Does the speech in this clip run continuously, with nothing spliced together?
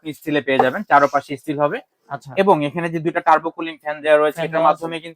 yes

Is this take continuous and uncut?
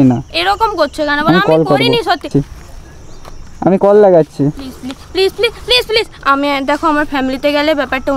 no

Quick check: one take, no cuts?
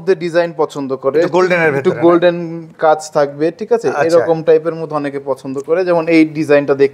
yes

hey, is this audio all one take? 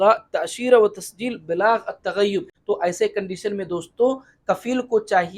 no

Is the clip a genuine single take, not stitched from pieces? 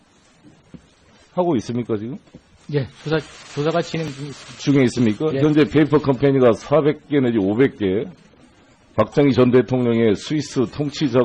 yes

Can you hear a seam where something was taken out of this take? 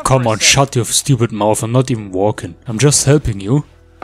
no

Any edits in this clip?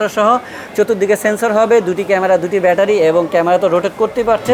no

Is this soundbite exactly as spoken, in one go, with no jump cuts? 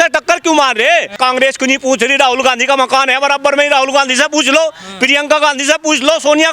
no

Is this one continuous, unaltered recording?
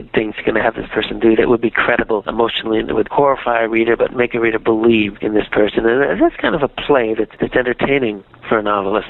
yes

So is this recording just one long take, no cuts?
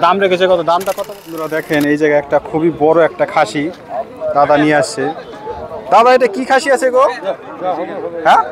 no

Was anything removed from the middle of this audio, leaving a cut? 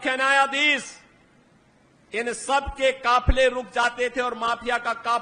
no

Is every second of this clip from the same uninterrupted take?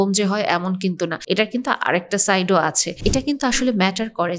no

